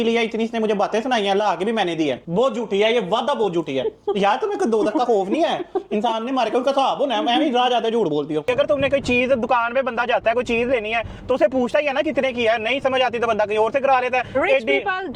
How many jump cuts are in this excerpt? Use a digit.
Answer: 2